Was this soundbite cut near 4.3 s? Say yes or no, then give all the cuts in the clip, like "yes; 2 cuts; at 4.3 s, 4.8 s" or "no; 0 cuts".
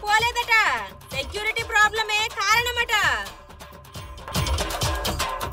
yes; 1 cut; at 4.3 s